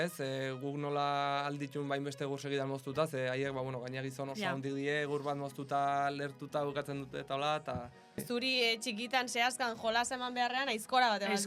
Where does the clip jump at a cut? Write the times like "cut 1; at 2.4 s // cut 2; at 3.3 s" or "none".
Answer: cut 1; at 8.2 s